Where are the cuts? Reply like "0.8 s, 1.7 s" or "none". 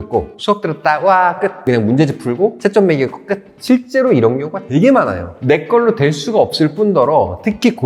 1.6 s